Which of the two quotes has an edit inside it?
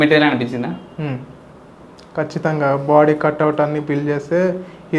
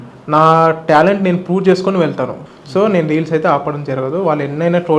second; 1 cut; at 2.4 s

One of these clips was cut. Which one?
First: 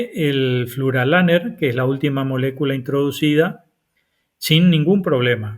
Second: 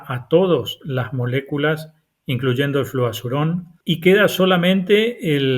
second; 1 cut; at 3.7 s

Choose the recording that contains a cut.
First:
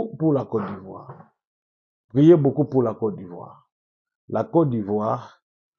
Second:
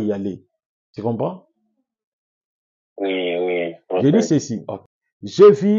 second; 1 cut; at 4.0 s

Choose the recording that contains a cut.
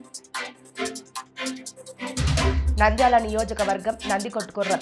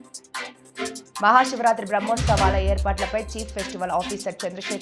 second; 1 cut; at 1.2 s

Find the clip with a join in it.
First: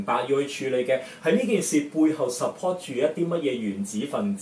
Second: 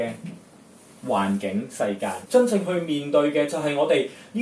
second; 1 cut; at 2.1 s

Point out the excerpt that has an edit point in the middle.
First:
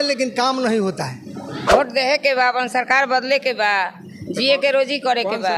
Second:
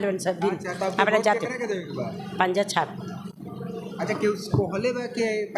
first; 1 cut; at 1.6 s

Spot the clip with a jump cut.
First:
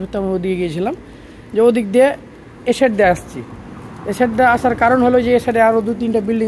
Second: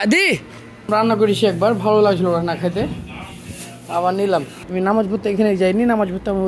second; 2 cuts; at 0.9 s, 4.6 s

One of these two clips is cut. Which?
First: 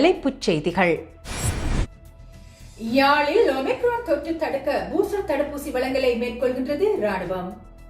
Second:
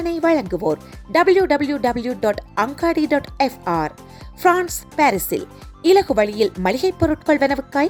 first; 1 cut; at 1.2 s

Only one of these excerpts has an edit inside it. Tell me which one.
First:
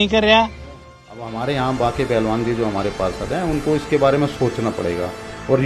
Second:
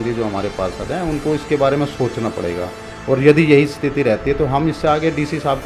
first; 1 cut; at 1.2 s

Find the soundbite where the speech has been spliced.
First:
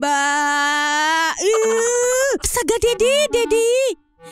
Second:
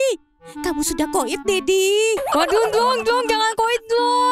first; 1 cut; at 2.4 s

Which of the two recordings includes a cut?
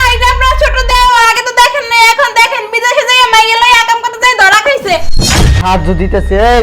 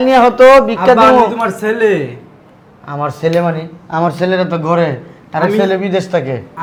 first; 1 cut; at 5.3 s

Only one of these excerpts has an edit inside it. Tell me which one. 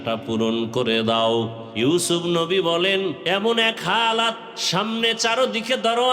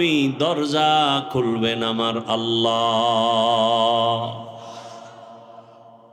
first; 3 cuts; at 1.6 s, 3.2 s, 4.5 s

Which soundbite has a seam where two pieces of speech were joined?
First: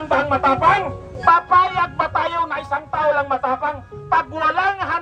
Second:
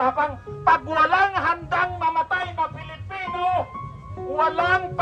first; 1 cut; at 1.0 s

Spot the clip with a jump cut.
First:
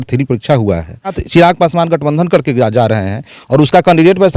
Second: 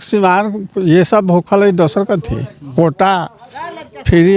first; 1 cut; at 1.2 s

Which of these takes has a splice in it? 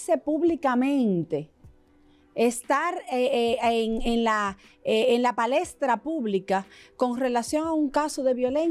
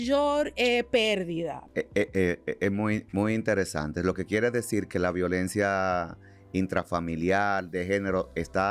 second; 1 cut; at 1.6 s

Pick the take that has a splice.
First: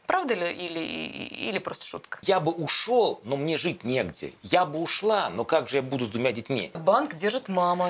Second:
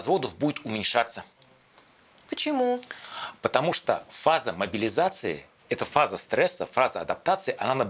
first; 2 cuts; at 2.1 s, 6.8 s

